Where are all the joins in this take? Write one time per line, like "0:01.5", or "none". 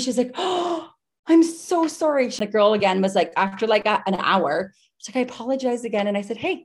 0:02.4